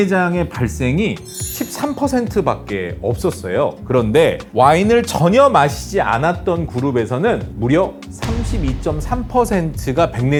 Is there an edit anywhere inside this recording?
no; 0 cuts

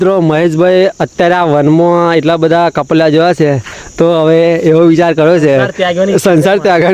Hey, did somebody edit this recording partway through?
no; 0 cuts

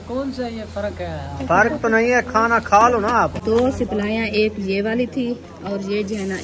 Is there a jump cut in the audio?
yes; 1 cut; at 3.4 s

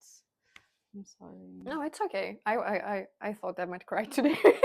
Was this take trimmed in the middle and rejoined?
no; 0 cuts

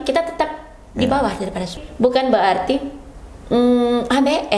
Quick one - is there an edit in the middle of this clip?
yes; 1 cut; at 1.7 s

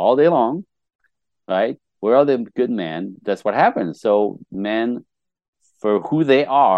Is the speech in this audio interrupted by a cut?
yes; 2 cuts; at 3.0 s, 4.5 s

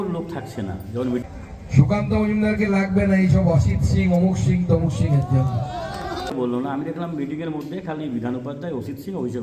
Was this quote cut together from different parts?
yes; 2 cuts; at 1.2 s, 6.3 s

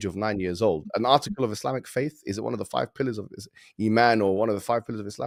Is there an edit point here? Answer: no; 0 cuts

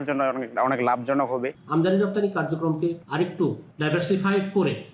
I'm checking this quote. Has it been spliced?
yes; 2 cuts; at 1.5 s, 3.2 s

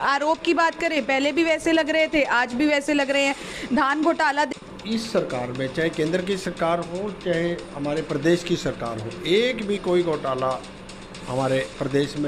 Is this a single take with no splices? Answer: no; 1 cut; at 4.5 s

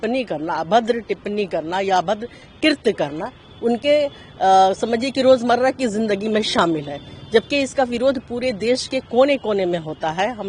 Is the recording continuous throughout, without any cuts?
yes; 0 cuts

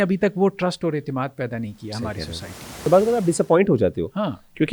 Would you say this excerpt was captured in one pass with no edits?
no; 1 cut; at 2.9 s

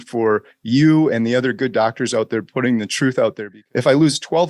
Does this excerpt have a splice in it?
yes; 1 cut; at 3.5 s

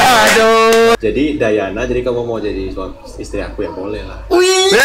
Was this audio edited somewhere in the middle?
yes; 1 cut; at 1.0 s

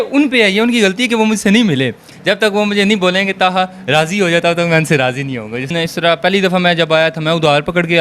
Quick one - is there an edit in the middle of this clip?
yes; 2 cuts; at 2.0 s, 5.6 s

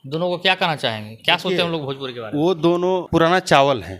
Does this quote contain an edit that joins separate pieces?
yes; 1 cut; at 3.1 s

